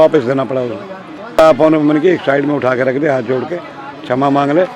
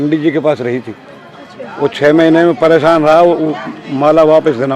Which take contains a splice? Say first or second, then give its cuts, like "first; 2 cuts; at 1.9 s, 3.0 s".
first; 1 cut; at 1.4 s